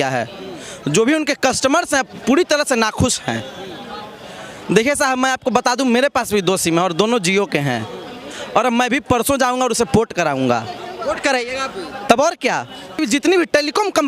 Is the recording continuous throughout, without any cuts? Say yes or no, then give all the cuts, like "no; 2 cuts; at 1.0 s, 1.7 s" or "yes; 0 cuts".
no; 1 cut; at 13.0 s